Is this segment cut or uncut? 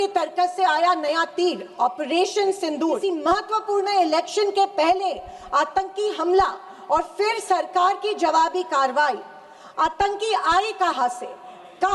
cut